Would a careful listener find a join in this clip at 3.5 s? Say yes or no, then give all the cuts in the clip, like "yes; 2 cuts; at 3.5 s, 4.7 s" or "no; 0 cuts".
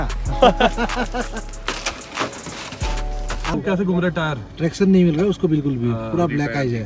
yes; 1 cut; at 3.5 s